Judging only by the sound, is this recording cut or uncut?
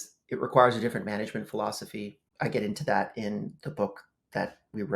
cut